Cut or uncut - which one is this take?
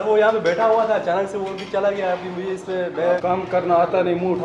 cut